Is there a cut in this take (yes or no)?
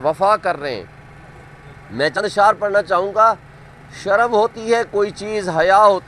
yes